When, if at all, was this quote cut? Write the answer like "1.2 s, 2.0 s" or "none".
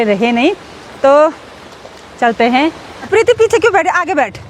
2.9 s